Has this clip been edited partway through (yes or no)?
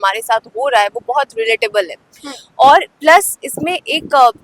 no